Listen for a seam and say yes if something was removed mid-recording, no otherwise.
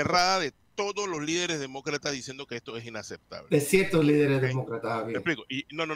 no